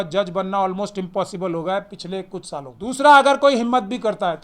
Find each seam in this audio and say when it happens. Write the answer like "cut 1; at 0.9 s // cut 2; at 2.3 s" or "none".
cut 1; at 2.7 s